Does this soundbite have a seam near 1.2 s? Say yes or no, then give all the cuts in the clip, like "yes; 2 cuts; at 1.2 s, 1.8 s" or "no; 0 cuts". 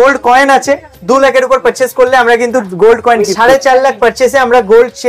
no; 1 cut; at 3.3 s